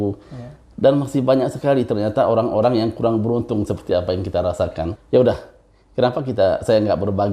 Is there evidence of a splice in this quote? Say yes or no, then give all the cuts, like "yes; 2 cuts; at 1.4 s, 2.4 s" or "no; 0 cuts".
yes; 1 cut; at 4.9 s